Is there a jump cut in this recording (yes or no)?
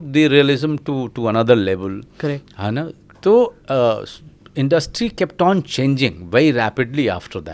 no